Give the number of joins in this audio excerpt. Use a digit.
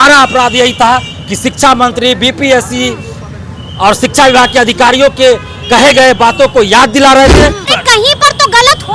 1